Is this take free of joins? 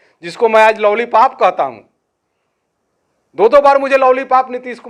yes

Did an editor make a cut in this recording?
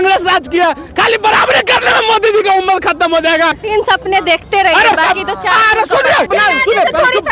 yes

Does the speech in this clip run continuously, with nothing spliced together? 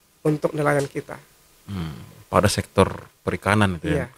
yes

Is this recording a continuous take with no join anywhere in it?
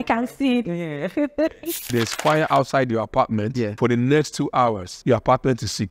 no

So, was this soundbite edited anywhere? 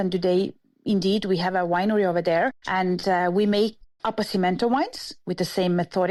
no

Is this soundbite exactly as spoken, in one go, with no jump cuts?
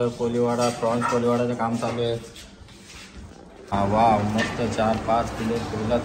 no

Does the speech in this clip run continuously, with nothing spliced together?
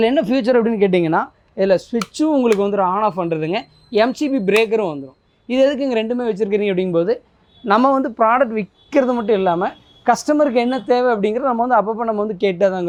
yes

